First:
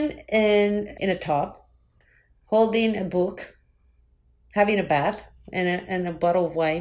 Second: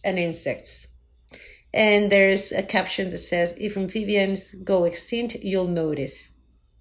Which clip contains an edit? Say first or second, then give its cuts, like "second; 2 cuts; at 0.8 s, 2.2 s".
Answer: first; 1 cut; at 0.9 s